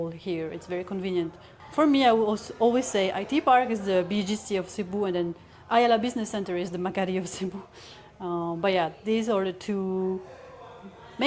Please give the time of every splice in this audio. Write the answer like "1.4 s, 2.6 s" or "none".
none